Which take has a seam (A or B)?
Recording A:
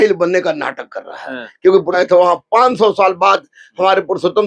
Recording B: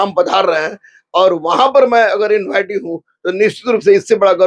A